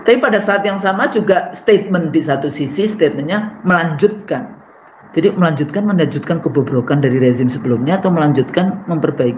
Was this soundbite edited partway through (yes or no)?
no